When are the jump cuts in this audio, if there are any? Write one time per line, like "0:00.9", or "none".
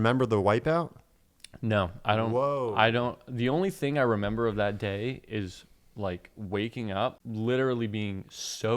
0:07.2